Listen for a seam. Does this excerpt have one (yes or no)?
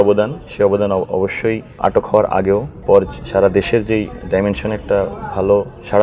yes